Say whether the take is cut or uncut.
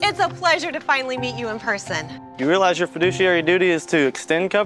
cut